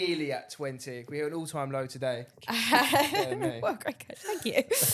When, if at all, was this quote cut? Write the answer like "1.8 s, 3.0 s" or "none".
2.3 s